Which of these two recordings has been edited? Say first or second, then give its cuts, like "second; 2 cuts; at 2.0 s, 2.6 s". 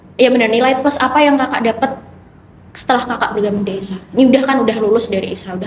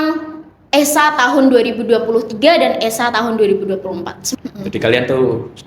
second; 1 cut; at 4.2 s